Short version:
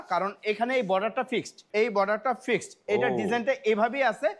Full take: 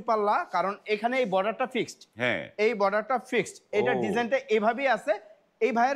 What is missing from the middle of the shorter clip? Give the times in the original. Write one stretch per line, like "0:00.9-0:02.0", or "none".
0:02.0-0:02.4